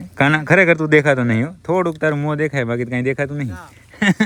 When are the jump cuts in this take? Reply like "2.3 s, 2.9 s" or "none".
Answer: none